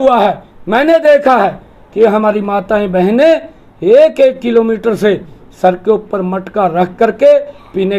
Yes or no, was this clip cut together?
no